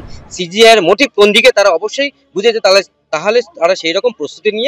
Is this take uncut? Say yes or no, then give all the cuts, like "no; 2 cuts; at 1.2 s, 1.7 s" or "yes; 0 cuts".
yes; 0 cuts